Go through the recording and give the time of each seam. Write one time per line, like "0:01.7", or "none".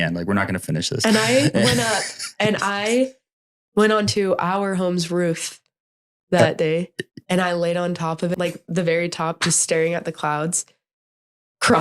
0:08.3

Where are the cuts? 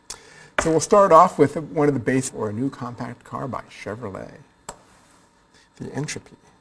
none

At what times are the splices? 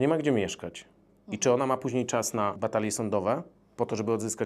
0:02.6

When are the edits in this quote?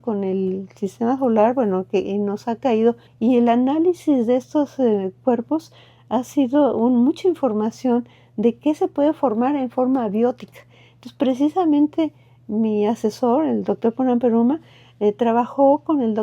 0:03.1

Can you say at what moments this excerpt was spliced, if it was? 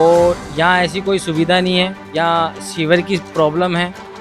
0:02.0

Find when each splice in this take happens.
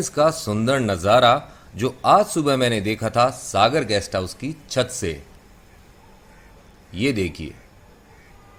none

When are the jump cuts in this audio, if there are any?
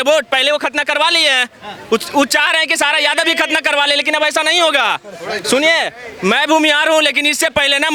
none

